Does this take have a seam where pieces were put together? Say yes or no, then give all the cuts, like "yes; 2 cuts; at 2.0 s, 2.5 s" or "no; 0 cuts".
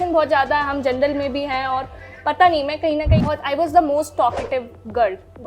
yes; 1 cut; at 3.2 s